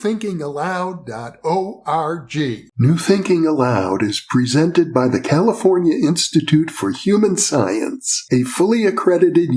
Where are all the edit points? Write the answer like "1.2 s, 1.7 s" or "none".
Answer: 2.6 s

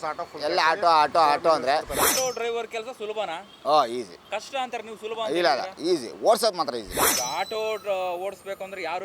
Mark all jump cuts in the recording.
2.1 s, 3.5 s, 4.2 s, 7.1 s

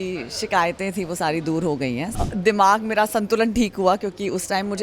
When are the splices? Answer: 2.1 s

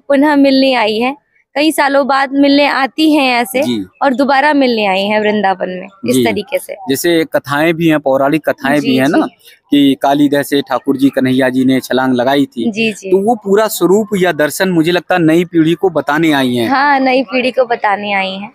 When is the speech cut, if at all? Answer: none

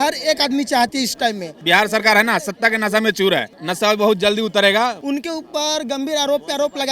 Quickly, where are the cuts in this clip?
1.5 s, 5.0 s

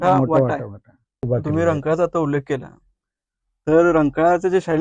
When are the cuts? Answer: 1.3 s

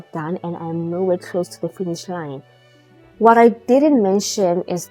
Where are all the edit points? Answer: none

